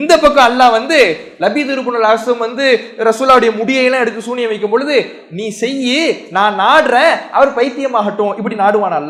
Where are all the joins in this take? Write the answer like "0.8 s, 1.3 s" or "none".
none